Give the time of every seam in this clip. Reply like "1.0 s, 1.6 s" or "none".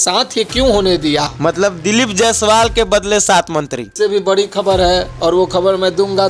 1.3 s, 3.9 s